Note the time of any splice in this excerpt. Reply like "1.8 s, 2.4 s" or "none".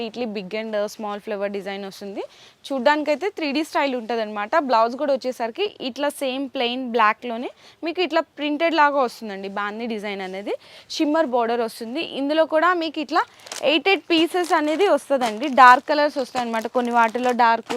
none

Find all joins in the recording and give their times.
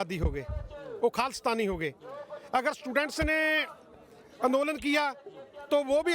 none

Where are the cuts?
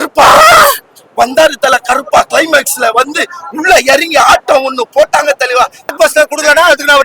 5.9 s

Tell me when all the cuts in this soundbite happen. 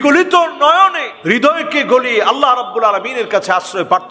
1.1 s

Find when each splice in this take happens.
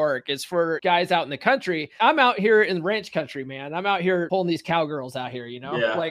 0.8 s, 1.9 s, 4.3 s

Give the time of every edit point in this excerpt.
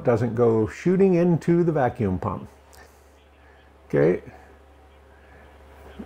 2.8 s

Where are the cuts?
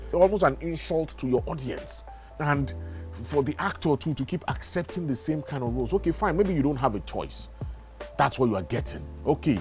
none

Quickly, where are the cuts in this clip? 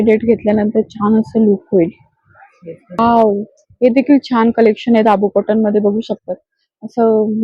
3.0 s

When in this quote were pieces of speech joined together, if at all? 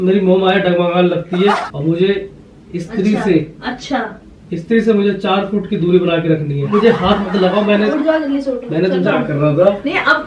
1.6 s, 6.7 s, 9.1 s

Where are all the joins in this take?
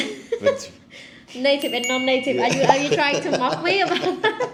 none

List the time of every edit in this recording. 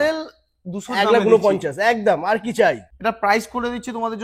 2.9 s

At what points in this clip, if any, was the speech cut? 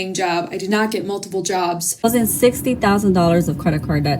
1.9 s

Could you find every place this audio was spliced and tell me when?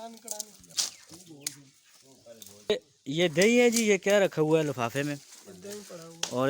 2.6 s

